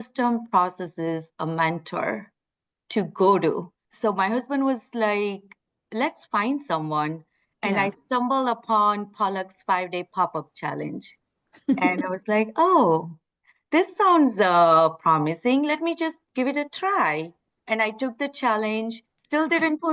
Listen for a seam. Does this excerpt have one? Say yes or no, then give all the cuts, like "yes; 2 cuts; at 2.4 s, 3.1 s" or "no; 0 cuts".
no; 0 cuts